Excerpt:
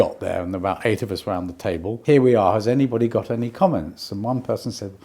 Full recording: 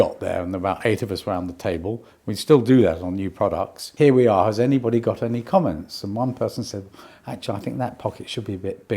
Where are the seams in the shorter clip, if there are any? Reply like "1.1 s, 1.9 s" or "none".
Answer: 1.9 s

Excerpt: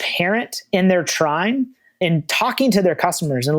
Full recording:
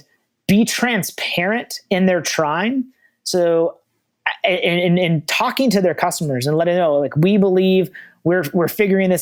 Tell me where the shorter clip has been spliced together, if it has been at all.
2.0 s

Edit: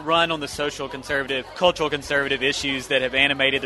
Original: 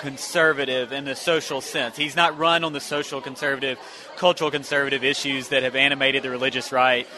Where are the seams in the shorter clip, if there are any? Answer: 1.5 s

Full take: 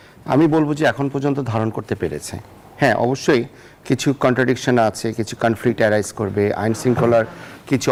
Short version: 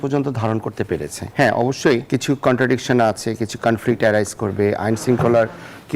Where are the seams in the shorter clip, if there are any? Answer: 1.2 s, 2.0 s

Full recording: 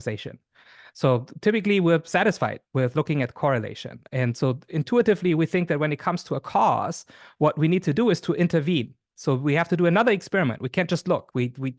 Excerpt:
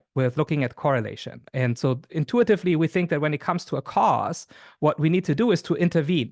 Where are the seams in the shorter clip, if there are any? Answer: none

